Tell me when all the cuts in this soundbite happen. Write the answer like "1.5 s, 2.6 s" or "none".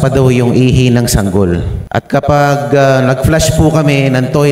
1.8 s